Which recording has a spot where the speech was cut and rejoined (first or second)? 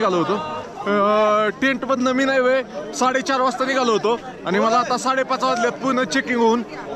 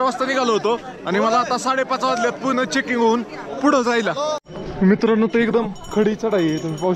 second